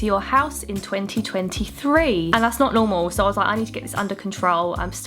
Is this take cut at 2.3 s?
yes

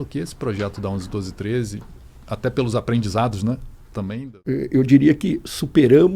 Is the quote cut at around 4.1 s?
yes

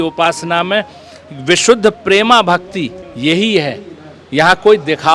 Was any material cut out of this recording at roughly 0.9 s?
no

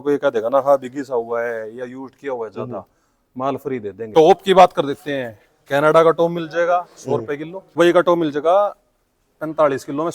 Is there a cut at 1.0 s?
no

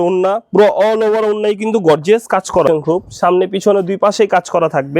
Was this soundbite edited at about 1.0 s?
no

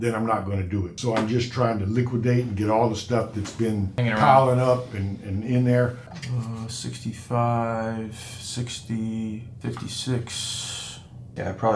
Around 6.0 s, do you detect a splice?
yes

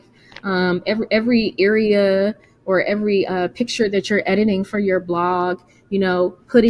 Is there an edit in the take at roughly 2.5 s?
no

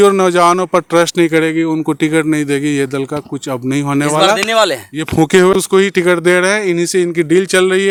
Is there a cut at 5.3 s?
no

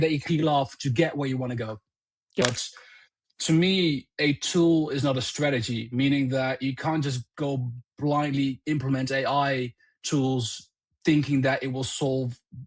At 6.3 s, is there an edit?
no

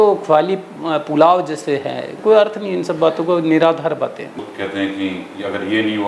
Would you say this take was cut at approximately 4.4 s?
yes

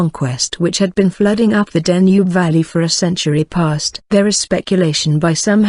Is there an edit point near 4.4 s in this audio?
no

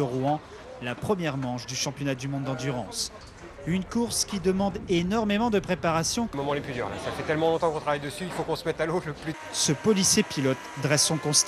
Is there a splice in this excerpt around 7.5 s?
no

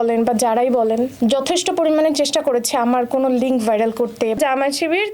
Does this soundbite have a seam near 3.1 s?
no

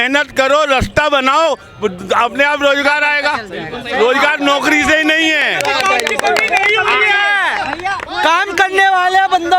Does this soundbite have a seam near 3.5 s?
no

